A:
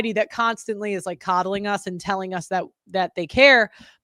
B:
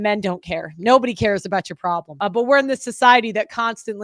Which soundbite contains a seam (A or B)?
B